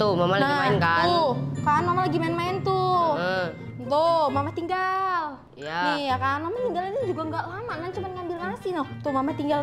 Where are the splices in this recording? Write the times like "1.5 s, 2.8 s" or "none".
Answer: none